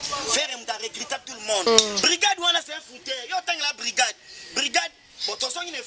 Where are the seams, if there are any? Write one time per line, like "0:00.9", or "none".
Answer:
0:01.7